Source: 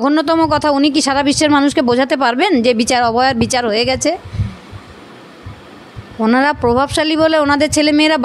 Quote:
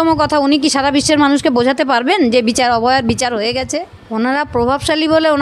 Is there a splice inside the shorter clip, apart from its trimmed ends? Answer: yes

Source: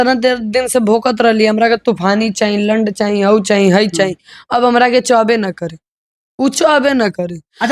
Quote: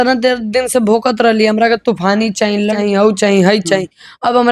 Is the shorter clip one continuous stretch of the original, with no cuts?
no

